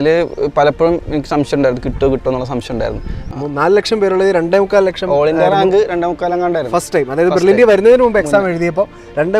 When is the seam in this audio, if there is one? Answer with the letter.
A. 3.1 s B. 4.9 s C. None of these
A